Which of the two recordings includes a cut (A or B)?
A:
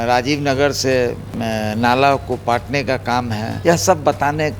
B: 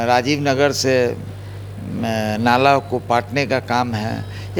A